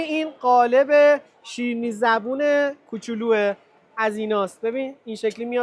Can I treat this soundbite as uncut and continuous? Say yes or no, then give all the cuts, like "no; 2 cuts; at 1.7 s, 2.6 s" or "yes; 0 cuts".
yes; 0 cuts